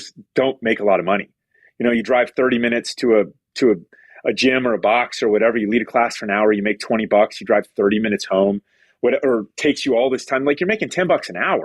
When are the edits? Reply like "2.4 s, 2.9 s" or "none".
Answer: none